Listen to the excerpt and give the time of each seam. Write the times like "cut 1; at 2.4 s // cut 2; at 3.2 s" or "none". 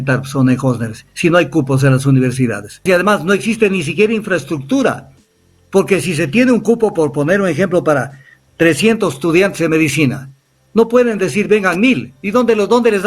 cut 1; at 2.8 s